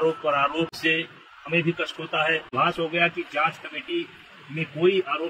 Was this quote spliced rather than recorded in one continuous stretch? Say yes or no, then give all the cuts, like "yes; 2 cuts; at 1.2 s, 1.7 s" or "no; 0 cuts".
yes; 1 cut; at 2.5 s